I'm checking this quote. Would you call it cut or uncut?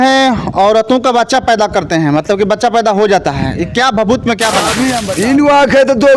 cut